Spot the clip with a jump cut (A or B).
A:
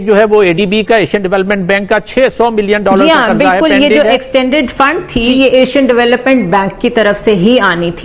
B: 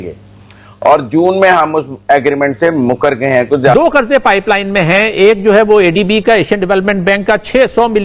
B